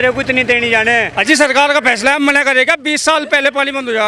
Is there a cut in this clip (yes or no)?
yes